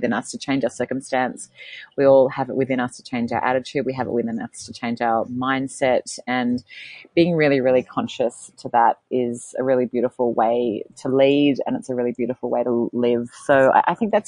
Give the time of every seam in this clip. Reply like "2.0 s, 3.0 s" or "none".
none